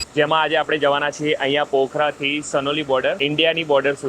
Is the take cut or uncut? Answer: cut